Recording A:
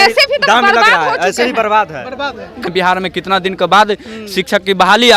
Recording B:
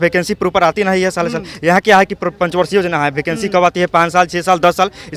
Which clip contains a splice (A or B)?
A